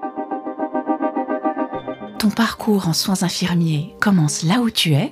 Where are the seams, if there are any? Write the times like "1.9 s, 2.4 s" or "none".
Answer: 2.1 s, 3.9 s